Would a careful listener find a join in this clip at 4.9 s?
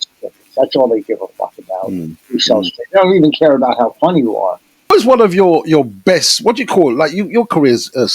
yes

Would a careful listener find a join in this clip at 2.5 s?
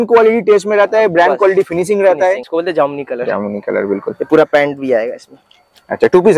yes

